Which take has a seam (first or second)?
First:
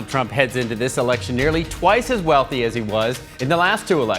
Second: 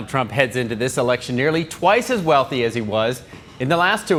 first